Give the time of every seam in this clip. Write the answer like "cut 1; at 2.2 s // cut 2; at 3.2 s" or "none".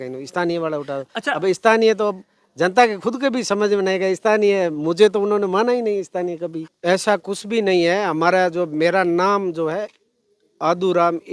cut 1; at 6.7 s